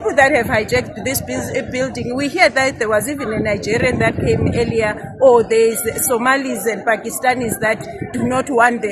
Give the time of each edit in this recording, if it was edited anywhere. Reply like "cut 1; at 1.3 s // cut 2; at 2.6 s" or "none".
none